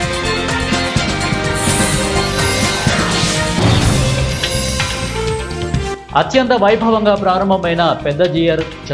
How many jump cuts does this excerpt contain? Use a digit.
1